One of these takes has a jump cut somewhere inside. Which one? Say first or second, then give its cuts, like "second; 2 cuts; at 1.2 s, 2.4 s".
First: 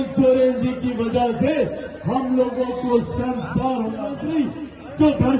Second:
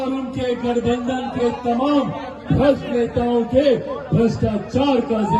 first; 1 cut; at 4.2 s